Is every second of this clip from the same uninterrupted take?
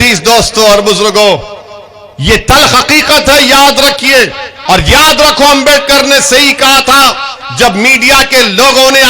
no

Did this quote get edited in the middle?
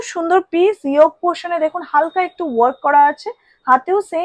no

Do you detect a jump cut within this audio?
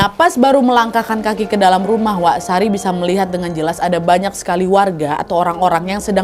no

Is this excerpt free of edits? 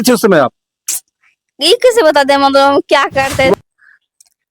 no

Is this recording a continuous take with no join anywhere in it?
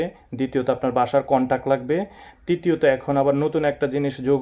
yes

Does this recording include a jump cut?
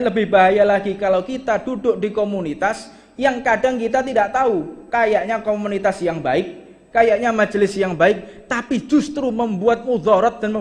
no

